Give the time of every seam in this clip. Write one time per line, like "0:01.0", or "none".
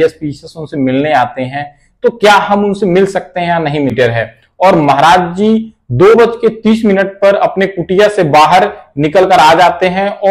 0:03.9